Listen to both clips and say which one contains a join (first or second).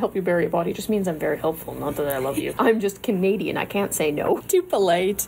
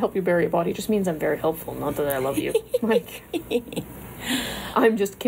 first